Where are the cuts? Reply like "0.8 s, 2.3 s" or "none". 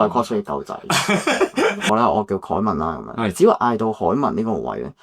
1.9 s